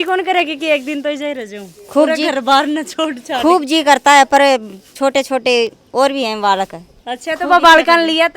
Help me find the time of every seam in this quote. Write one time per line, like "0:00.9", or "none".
none

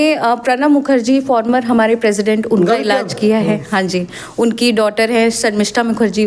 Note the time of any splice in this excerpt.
none

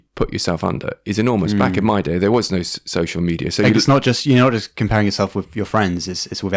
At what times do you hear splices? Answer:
none

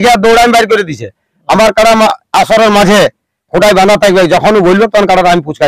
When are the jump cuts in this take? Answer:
none

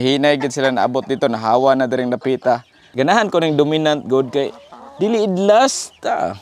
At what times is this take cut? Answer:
0:02.8

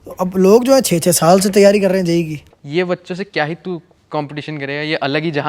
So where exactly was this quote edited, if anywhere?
0:02.4

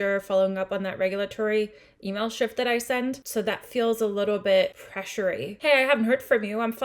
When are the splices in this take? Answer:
0:03.2
0:05.4

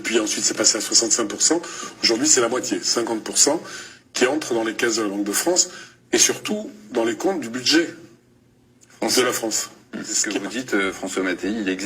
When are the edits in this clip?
0:10.3

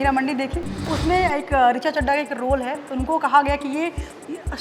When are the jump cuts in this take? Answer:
0:00.9

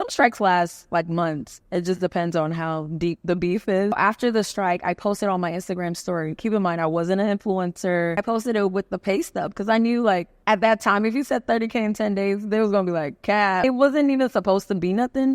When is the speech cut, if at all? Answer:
0:04.0
0:08.2
0:10.3
0:13.6

